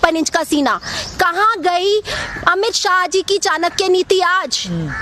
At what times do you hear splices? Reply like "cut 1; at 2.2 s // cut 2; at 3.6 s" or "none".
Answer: none